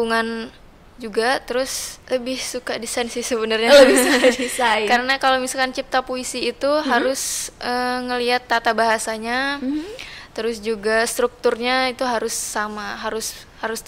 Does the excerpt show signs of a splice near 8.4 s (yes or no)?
no